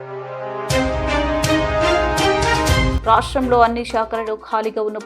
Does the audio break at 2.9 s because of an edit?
yes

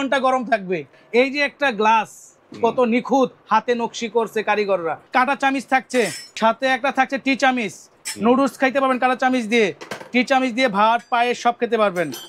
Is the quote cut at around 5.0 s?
yes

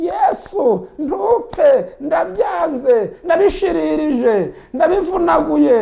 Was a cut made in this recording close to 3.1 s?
yes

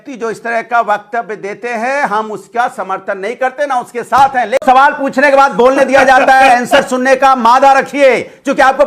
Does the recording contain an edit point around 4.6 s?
yes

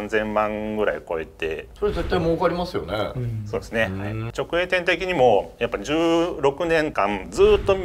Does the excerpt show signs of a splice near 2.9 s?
no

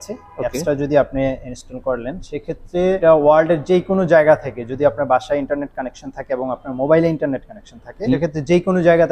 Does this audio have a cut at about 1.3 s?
no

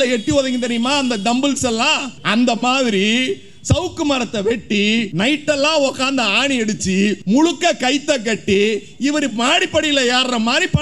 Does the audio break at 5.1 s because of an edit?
yes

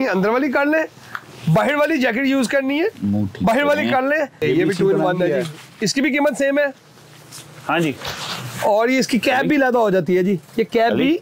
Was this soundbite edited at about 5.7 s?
no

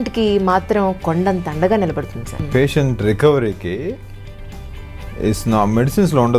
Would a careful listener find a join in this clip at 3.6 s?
no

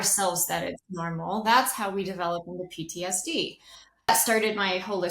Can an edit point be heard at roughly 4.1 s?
yes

